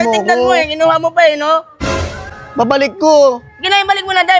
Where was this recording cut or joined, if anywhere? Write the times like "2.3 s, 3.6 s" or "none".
none